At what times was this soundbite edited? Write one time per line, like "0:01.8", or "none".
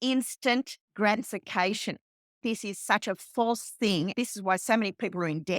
0:02.4
0:04.1